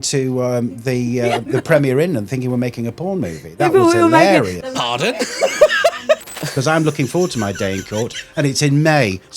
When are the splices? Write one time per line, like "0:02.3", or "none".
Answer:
0:06.2